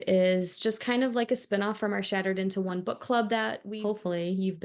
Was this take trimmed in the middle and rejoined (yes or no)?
yes